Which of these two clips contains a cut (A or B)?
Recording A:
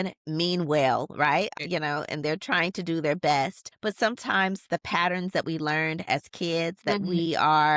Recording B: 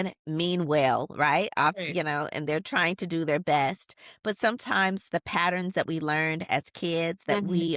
A